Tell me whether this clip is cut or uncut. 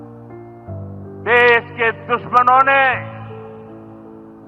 uncut